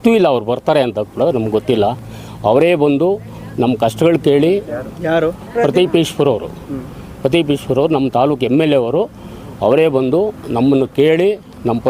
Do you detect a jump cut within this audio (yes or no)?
no